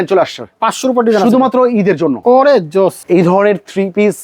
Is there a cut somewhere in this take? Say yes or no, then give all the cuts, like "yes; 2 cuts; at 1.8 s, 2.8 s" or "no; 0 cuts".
yes; 2 cuts; at 2.2 s, 3.0 s